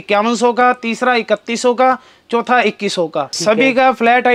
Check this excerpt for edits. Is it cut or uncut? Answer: cut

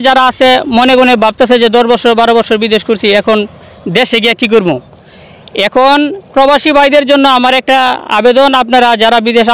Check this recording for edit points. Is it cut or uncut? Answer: uncut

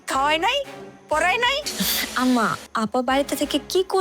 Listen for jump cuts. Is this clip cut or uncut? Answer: cut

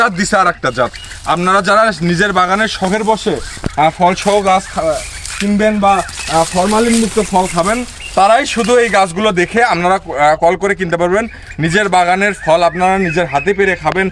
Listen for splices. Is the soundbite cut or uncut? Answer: uncut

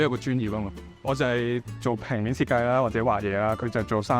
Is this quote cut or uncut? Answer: cut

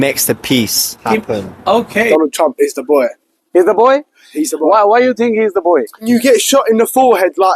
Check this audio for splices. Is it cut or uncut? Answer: cut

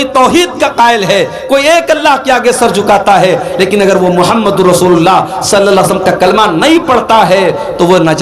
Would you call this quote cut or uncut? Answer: uncut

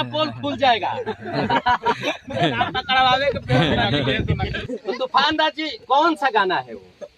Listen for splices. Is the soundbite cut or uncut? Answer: cut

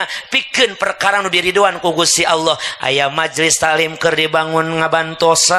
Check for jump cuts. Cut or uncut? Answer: uncut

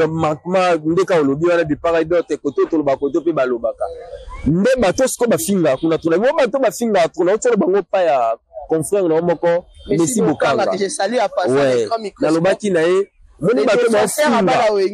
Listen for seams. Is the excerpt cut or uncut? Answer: uncut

